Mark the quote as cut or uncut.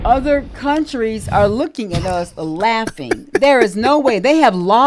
uncut